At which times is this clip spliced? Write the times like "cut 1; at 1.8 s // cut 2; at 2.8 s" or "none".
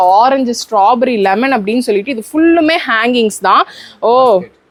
none